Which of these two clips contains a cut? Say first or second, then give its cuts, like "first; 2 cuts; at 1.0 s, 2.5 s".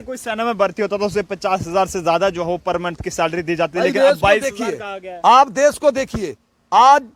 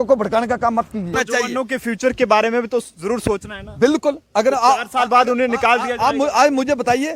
second; 1 cut; at 1.1 s